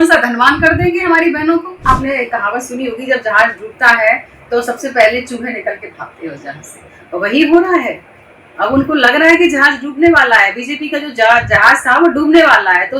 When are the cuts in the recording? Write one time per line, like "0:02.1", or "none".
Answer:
0:01.9